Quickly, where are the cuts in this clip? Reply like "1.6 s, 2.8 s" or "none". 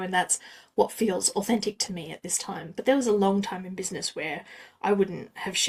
none

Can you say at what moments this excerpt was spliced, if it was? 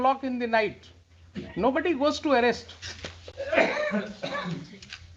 none

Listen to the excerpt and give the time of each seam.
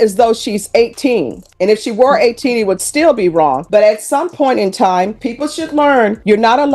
none

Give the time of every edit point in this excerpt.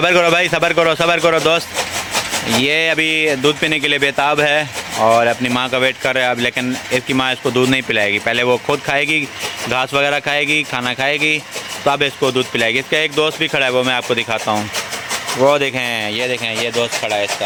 none

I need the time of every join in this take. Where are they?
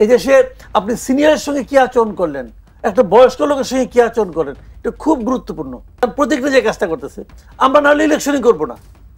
6.0 s

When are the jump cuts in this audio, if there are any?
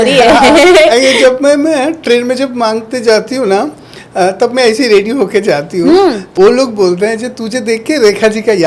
6.2 s

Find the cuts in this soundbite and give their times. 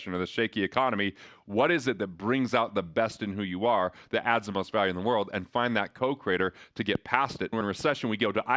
7.6 s

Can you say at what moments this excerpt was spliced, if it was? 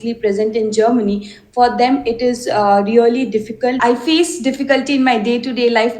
3.8 s

